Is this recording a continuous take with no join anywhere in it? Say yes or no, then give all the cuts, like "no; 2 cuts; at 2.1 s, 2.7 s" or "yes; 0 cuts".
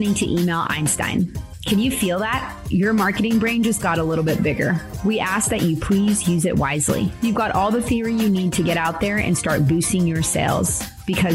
yes; 0 cuts